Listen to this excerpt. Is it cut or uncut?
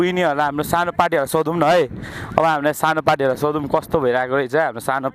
uncut